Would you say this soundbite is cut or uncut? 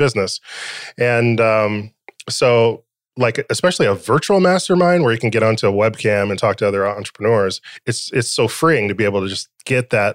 uncut